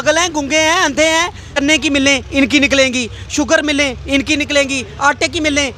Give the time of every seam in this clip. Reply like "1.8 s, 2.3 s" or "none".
1.6 s